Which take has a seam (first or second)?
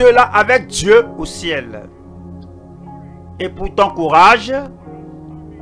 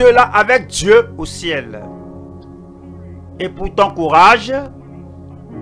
second